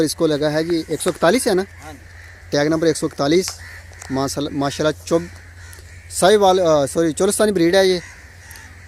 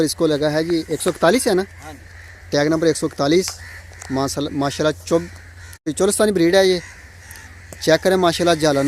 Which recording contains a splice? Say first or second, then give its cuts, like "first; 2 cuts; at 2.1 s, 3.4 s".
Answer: second; 1 cut; at 5.9 s